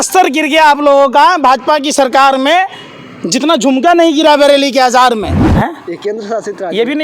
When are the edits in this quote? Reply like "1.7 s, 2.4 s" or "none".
5.4 s